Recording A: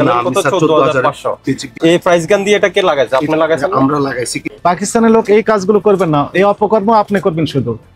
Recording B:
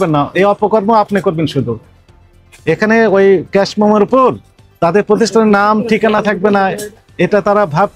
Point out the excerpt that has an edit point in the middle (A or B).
A